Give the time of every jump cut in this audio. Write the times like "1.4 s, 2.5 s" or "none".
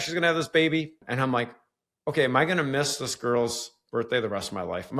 1.0 s